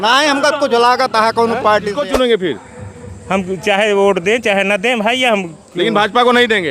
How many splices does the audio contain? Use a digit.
1